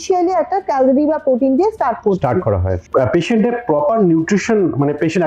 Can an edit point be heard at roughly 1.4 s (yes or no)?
no